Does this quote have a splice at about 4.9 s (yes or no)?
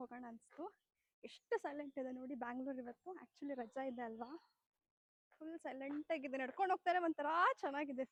no